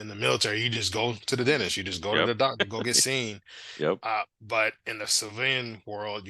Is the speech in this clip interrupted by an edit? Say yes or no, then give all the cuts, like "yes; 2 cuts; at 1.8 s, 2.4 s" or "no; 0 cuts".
yes; 1 cut; at 2.5 s